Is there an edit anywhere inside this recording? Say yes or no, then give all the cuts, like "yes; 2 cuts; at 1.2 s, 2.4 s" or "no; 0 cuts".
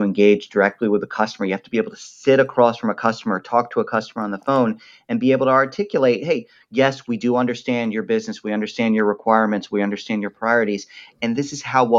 no; 0 cuts